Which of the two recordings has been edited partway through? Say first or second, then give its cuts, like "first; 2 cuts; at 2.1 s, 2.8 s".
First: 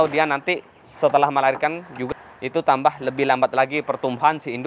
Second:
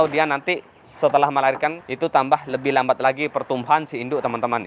second; 1 cut; at 1.8 s